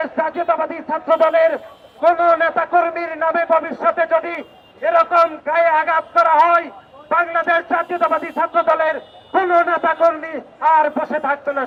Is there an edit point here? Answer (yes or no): no